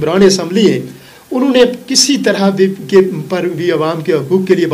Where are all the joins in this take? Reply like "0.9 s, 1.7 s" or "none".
none

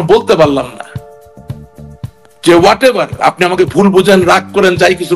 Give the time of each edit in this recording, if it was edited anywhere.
none

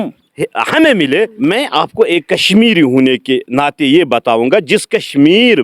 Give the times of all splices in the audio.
1.3 s

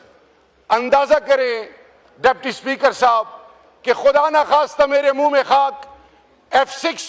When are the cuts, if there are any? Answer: none

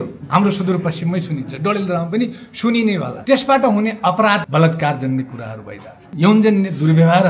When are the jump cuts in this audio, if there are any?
3.1 s, 4.4 s, 6.1 s

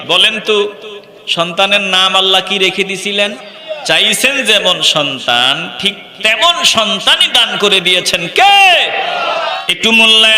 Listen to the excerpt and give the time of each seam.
3.6 s, 9.5 s

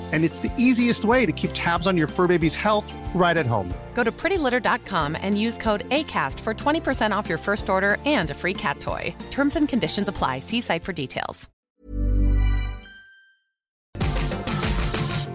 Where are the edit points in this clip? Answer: 11.6 s, 14.0 s

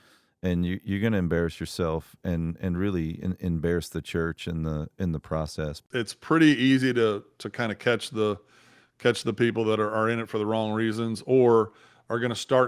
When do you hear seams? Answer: 5.8 s

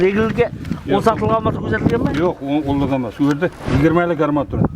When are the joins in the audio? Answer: 3.6 s

